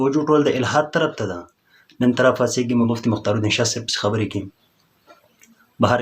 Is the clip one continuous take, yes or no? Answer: no